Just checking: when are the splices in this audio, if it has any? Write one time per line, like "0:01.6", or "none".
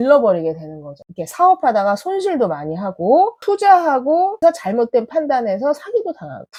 none